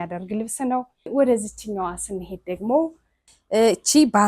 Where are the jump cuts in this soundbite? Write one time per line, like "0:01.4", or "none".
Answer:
0:01.1
0:03.1